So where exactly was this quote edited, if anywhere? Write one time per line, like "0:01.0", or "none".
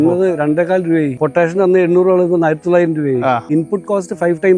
0:01.1
0:03.4